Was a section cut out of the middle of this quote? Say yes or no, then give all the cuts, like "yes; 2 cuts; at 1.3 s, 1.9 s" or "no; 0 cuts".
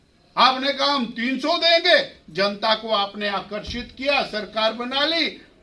no; 0 cuts